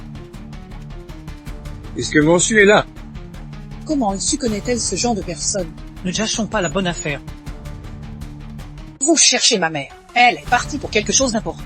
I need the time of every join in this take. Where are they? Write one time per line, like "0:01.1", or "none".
0:01.9
0:07.2
0:09.0